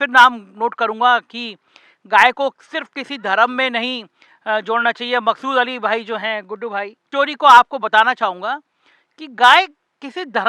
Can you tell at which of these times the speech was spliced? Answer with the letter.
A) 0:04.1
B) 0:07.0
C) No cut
B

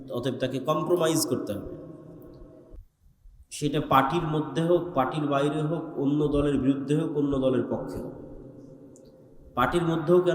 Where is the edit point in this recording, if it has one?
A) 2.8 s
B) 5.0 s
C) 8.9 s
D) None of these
A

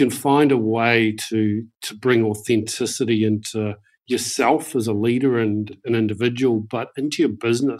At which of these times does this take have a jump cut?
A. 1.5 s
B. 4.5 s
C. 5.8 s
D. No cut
C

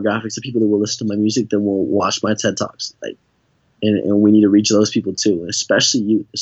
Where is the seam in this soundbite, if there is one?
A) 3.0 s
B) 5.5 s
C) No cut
C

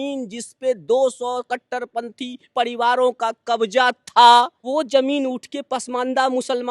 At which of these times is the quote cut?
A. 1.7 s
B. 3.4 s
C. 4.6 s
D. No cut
C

